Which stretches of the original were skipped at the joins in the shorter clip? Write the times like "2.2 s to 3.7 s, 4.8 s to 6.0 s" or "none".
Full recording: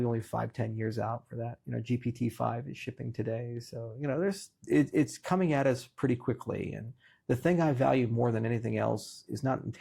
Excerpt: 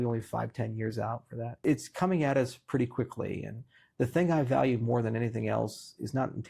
1.6 s to 4.9 s